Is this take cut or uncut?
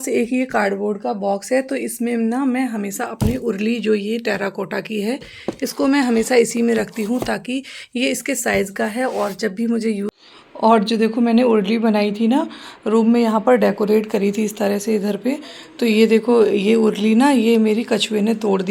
cut